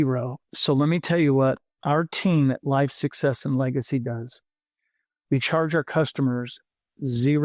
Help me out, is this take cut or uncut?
cut